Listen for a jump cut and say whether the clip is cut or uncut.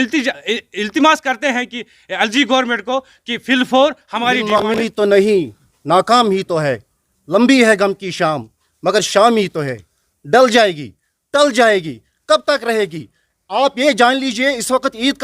cut